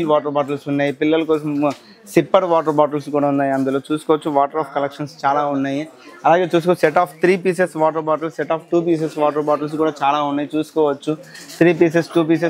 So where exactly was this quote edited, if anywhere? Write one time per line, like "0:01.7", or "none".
none